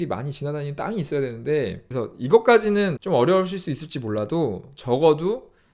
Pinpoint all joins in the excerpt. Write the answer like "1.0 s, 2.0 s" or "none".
1.8 s, 3.0 s